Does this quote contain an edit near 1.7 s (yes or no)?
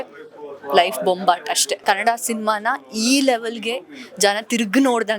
yes